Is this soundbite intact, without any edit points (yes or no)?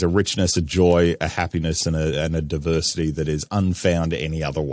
yes